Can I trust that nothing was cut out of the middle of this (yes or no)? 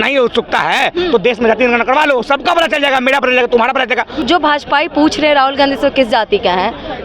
no